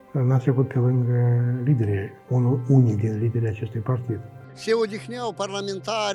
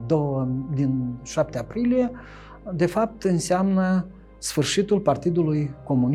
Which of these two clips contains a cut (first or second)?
first